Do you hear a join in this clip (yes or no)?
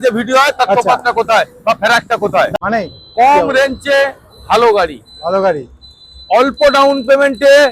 yes